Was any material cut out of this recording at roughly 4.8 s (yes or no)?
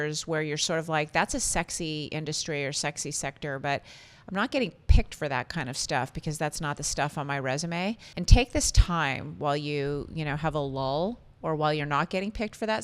no